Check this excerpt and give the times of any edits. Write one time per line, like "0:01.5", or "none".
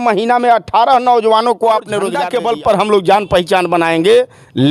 0:02.2